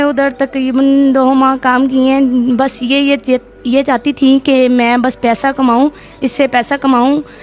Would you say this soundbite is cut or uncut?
uncut